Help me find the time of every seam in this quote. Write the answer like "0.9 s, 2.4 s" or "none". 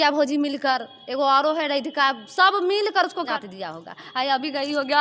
none